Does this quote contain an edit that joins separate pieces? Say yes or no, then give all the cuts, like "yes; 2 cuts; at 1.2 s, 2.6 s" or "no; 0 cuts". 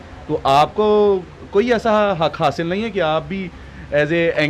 no; 0 cuts